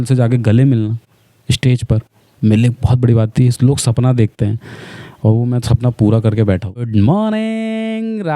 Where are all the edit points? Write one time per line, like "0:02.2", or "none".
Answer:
0:06.9